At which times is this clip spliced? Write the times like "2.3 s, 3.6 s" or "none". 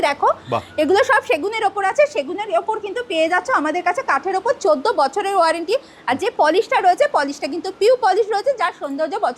none